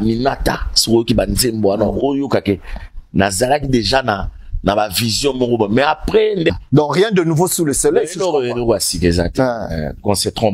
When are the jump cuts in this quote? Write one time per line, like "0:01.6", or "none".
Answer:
0:06.5